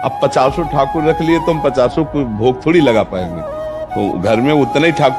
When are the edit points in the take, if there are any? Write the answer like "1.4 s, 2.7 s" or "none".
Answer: none